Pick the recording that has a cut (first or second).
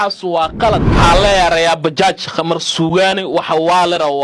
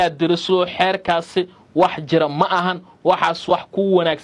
first